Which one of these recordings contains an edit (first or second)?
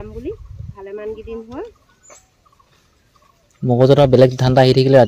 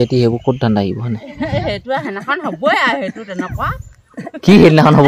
second